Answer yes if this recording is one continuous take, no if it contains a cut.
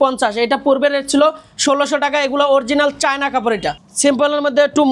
no